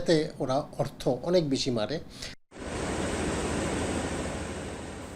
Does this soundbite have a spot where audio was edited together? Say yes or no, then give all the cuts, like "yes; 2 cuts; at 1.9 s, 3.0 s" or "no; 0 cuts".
no; 0 cuts